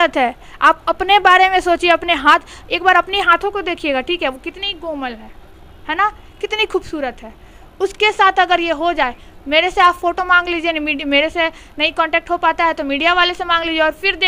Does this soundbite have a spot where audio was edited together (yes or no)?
no